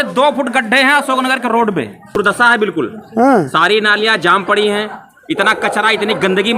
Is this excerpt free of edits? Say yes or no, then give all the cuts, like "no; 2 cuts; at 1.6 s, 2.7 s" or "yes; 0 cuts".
no; 1 cut; at 2.2 s